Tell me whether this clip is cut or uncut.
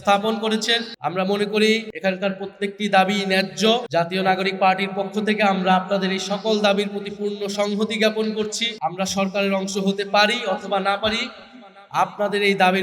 cut